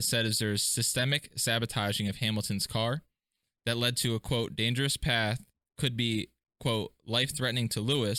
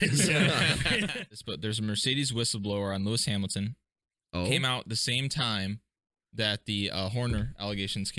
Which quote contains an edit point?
second; 1 cut; at 1.2 s

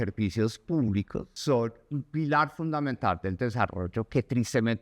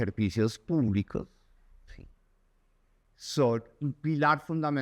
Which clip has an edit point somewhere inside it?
first; 1 cut; at 1.3 s

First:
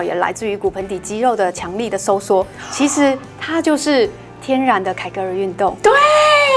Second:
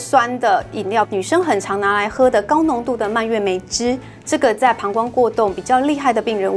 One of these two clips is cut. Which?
second; 1 cut; at 1.1 s

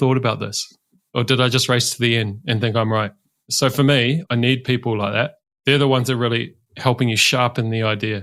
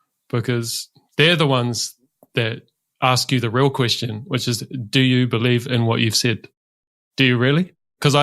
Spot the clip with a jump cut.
second; 1 cut; at 6.9 s

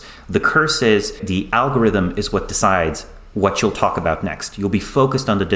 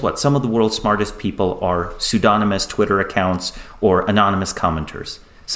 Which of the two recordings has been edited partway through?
first; 1 cut; at 1.2 s

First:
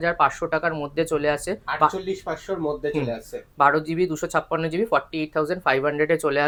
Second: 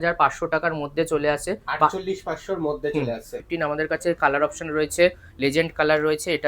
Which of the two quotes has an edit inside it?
second; 1 cut; at 3.5 s

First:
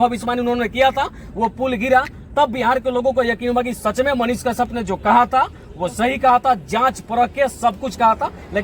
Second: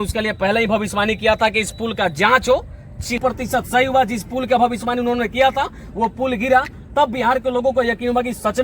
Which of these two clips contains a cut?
second; 1 cut; at 3.2 s

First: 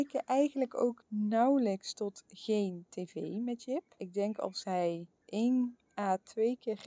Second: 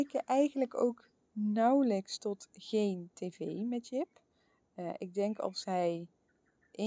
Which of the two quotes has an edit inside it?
first; 4 cuts; at 1.0 s, 4.0 s, 5.1 s, 5.8 s

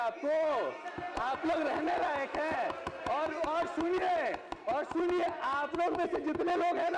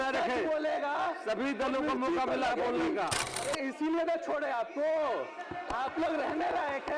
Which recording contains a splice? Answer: second; 1 cut; at 3.2 s

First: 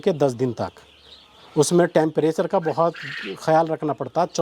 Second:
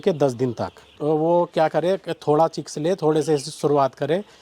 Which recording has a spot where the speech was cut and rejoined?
second; 1 cut; at 0.9 s

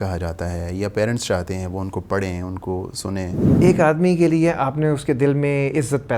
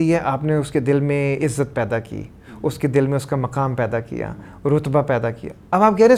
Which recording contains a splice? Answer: first; 1 cut; at 3.4 s

